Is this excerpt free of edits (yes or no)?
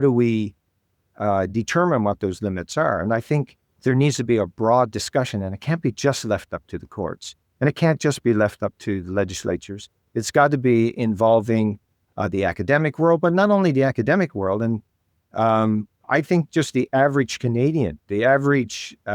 yes